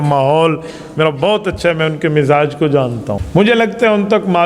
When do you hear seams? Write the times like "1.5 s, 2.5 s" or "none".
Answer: 3.1 s